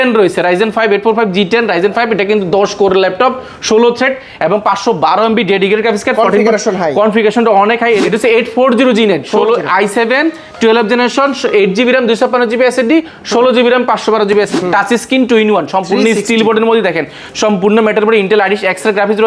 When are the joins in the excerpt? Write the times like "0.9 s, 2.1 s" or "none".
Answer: 8.0 s, 14.5 s